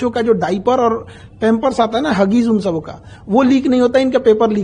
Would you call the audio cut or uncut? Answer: uncut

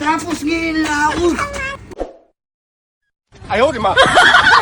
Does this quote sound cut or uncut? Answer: cut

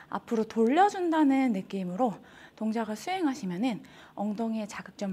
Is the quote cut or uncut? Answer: uncut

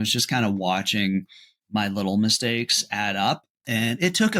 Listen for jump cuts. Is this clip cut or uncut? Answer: uncut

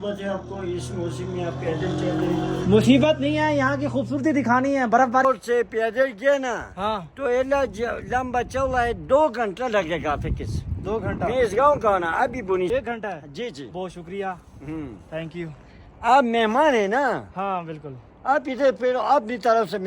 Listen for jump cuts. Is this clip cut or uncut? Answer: cut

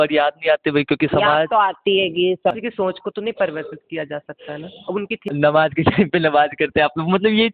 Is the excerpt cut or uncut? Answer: cut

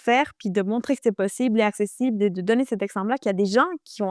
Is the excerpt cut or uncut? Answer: uncut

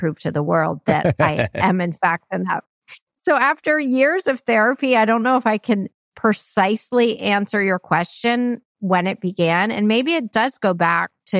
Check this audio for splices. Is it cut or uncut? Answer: uncut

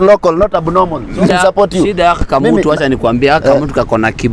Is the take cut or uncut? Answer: cut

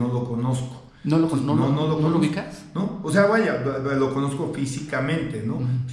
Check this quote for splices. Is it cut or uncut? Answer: uncut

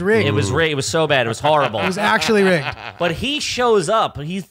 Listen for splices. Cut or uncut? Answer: uncut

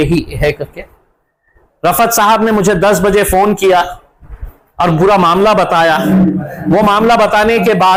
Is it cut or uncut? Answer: uncut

